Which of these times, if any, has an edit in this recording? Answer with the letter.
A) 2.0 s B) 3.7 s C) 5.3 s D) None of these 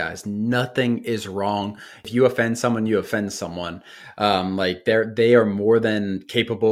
A